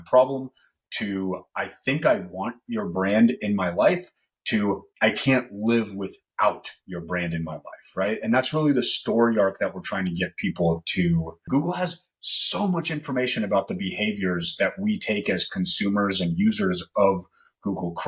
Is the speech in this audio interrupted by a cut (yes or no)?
yes